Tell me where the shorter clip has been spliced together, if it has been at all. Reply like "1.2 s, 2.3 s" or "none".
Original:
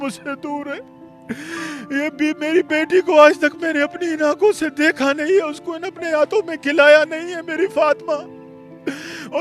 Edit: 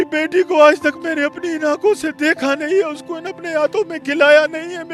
none